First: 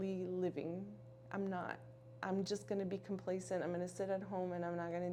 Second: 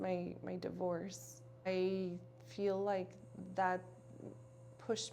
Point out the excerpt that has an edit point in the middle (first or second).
second